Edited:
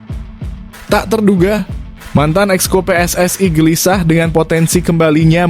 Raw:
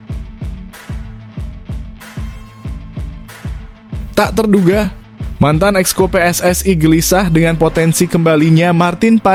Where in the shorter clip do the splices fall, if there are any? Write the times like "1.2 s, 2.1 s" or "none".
0.9 s